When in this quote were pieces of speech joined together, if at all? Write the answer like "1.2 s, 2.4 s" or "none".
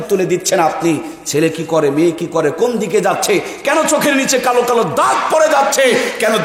none